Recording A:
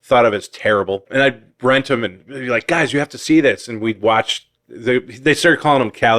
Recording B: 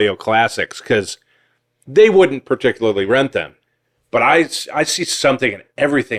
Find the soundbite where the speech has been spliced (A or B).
A